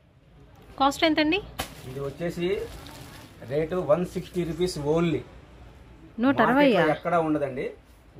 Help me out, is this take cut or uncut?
uncut